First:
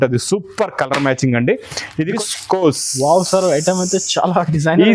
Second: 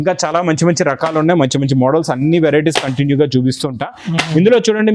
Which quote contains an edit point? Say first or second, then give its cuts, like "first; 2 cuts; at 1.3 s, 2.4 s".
first; 1 cut; at 2.2 s